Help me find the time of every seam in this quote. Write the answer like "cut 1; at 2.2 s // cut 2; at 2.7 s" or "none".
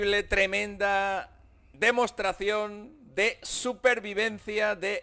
none